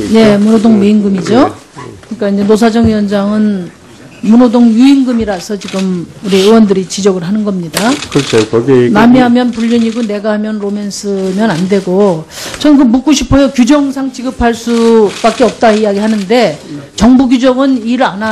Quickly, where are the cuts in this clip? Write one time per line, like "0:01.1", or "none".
none